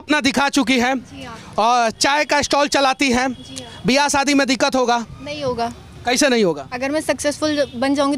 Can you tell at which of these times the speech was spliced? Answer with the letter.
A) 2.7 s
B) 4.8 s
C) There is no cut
C